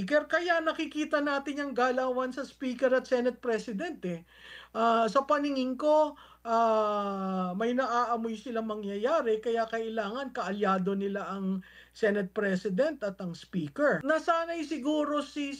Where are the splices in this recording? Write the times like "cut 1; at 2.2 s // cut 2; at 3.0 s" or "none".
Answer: cut 1; at 14.0 s